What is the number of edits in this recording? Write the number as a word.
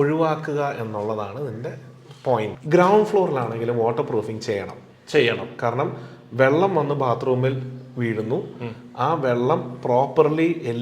one